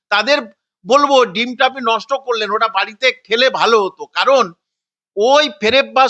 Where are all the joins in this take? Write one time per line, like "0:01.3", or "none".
none